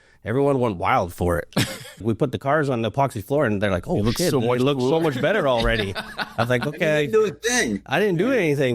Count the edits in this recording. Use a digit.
1